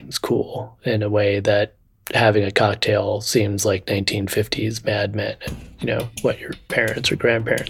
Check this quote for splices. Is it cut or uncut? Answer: uncut